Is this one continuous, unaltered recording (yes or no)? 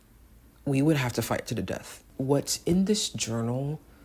no